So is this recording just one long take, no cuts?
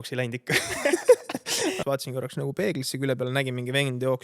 no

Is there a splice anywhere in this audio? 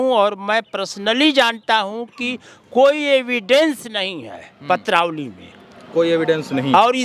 no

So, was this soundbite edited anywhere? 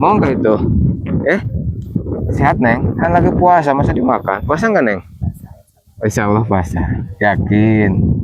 no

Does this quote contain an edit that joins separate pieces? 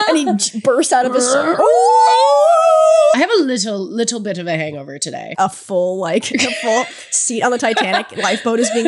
yes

